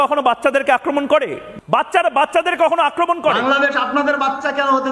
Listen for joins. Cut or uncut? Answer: cut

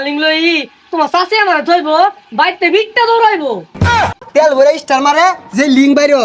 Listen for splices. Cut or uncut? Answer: cut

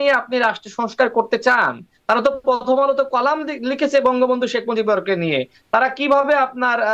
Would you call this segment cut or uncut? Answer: uncut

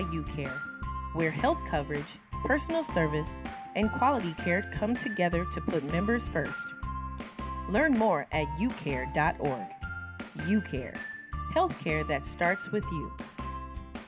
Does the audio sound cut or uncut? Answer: uncut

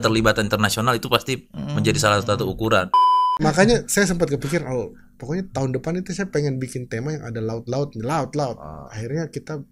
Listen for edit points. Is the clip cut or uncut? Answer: cut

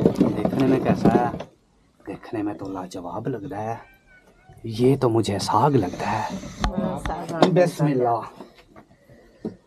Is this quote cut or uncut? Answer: cut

